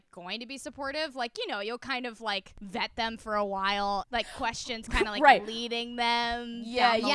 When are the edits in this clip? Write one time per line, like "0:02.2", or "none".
0:02.5
0:04.1